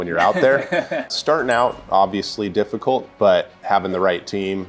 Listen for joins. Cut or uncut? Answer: cut